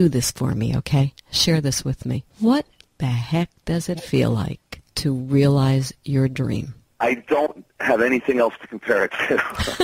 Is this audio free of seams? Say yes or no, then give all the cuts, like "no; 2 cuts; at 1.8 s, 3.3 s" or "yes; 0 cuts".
yes; 0 cuts